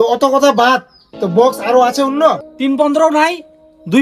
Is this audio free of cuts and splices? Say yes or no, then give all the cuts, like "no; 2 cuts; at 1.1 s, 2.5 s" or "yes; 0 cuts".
no; 1 cut; at 2.5 s